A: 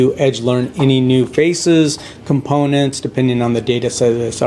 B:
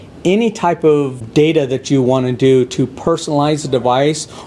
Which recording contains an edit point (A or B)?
B